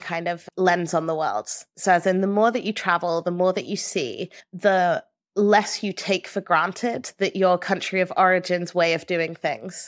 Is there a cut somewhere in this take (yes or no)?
no